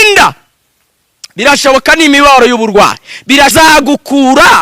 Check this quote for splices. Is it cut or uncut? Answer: cut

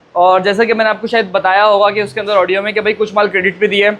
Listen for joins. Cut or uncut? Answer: uncut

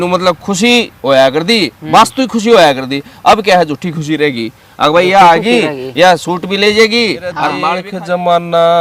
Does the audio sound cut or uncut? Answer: cut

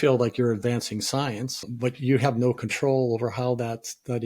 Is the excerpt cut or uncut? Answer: cut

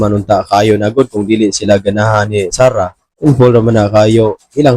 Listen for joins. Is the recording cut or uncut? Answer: cut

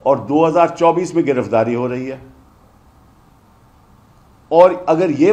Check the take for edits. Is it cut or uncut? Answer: uncut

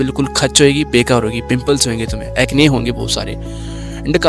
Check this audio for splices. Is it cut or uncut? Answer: uncut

